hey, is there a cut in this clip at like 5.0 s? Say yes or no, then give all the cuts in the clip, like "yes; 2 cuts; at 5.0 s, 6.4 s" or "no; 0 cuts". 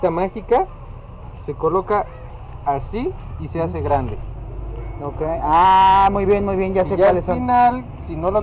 no; 0 cuts